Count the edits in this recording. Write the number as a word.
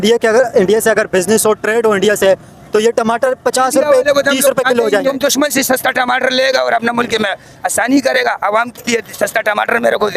one